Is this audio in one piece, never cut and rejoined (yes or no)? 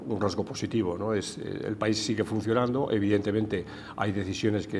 yes